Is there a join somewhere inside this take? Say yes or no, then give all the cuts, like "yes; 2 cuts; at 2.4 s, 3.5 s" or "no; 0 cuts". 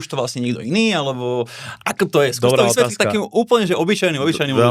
no; 0 cuts